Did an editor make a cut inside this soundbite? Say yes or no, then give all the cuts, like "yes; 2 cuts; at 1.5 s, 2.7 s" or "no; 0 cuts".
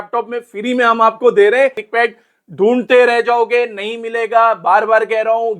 yes; 1 cut; at 1.8 s